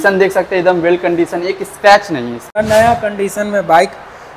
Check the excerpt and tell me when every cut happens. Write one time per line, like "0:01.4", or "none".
0:02.5